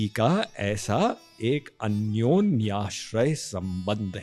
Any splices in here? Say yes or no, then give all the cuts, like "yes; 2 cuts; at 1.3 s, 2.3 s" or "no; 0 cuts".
no; 0 cuts